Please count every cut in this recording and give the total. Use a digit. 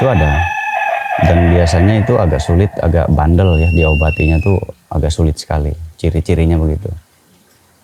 0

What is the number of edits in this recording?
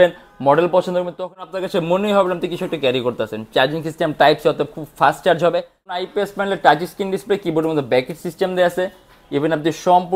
2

